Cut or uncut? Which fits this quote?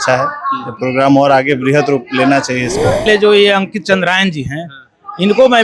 cut